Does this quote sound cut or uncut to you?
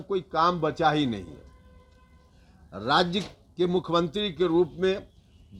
uncut